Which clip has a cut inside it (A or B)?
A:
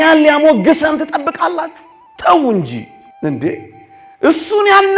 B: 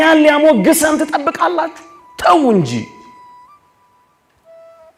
A